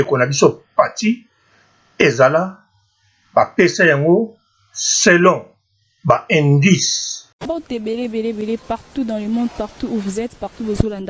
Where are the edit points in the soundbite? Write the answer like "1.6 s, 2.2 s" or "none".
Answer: 7.3 s